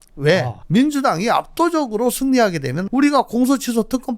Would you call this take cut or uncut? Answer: cut